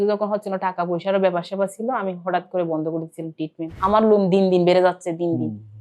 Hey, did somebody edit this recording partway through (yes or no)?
yes